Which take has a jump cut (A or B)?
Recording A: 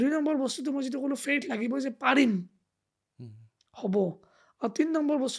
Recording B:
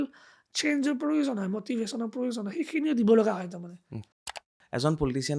B